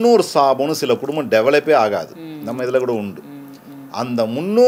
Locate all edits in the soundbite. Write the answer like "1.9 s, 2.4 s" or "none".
none